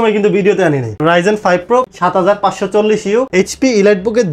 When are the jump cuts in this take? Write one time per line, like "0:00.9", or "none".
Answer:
0:00.9
0:03.3